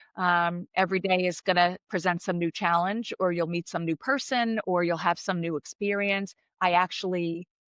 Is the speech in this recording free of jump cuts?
yes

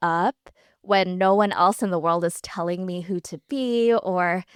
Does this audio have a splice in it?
no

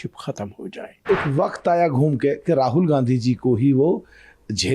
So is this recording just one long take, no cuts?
no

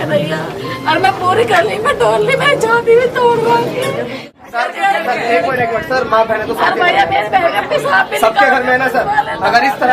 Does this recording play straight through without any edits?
no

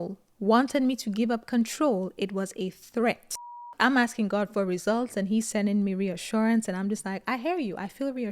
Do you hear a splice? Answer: yes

